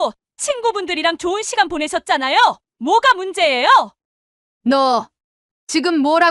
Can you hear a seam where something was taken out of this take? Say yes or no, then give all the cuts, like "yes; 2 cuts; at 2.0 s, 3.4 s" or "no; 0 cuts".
yes; 1 cut; at 4.0 s